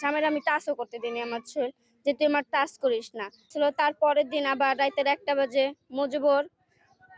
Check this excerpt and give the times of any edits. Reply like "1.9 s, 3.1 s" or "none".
3.5 s